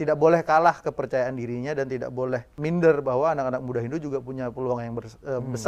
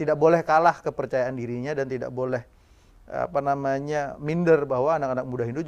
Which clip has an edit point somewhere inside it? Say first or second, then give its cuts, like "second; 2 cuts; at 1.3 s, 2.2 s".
first; 1 cut; at 2.5 s